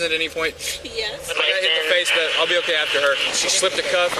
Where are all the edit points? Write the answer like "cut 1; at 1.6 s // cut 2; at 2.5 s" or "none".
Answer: cut 1; at 1.3 s // cut 2; at 3.3 s